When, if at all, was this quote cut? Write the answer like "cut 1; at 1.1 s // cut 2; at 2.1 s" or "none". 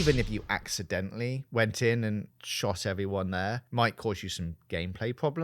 cut 1; at 1.4 s // cut 2; at 2.4 s // cut 3; at 3.6 s